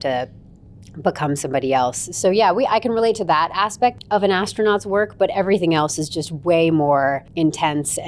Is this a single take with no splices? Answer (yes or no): no